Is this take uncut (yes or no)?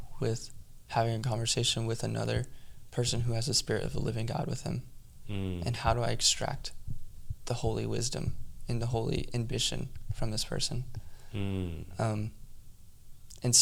yes